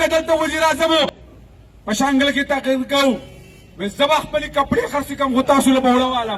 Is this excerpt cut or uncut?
cut